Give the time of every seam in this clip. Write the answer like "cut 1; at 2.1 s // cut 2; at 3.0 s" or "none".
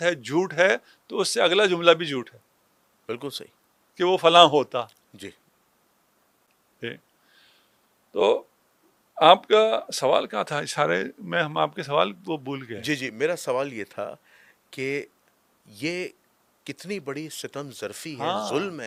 none